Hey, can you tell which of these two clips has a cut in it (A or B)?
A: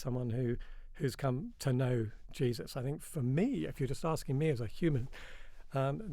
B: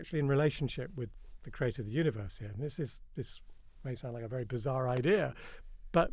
A